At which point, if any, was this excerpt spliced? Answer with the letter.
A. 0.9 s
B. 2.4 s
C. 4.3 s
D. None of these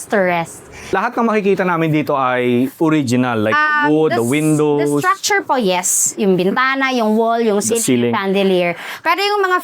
A